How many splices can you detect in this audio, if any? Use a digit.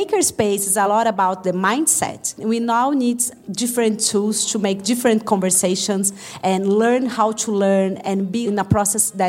4